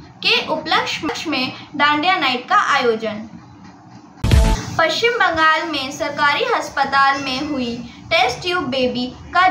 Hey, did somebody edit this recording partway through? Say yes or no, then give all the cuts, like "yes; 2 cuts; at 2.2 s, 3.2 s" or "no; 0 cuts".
yes; 1 cut; at 4.2 s